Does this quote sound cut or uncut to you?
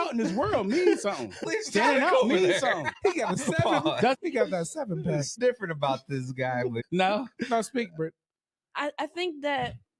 cut